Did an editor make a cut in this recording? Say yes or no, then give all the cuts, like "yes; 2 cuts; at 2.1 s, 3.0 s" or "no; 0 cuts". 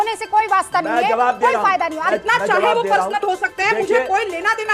yes; 1 cut; at 2.0 s